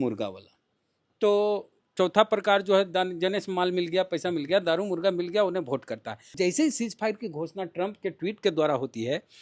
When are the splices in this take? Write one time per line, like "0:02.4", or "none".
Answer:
0:06.3